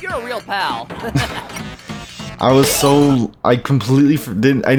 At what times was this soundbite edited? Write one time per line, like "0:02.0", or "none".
none